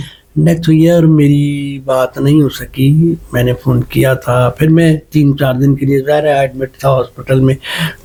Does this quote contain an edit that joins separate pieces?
no; 0 cuts

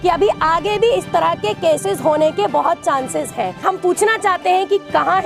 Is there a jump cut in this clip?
yes; 1 cut; at 3.6 s

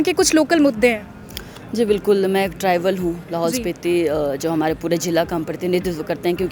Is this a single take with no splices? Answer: yes; 0 cuts

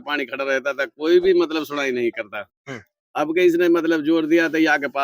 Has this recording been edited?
no; 0 cuts

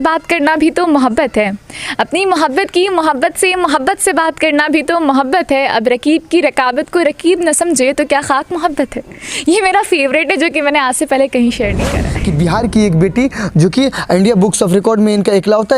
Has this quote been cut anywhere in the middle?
yes; 1 cut; at 12.1 s

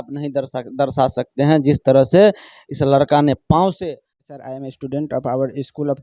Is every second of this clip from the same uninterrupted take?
no; 1 cut; at 4.5 s

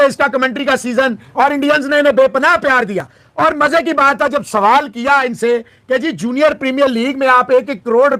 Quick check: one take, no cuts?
yes; 0 cuts

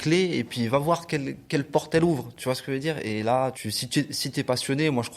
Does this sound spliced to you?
yes; 1 cut; at 3.6 s

